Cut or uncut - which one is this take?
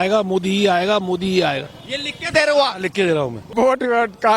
cut